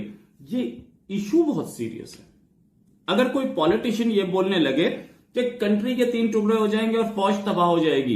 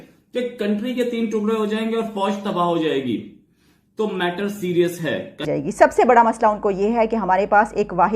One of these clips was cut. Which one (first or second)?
second